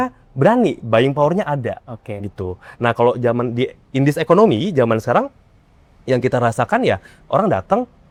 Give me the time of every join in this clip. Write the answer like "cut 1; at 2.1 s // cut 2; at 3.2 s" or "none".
none